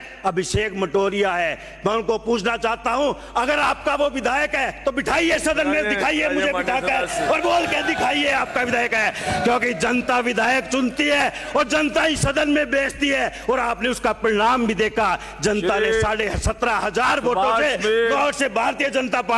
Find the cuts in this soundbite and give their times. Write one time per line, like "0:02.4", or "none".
none

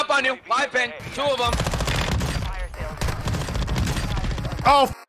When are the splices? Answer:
0:01.0

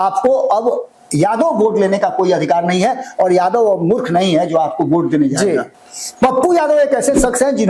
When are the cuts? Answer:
0:05.8

